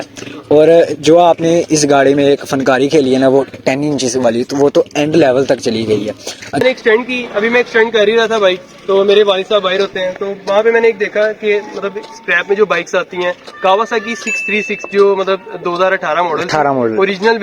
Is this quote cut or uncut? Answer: cut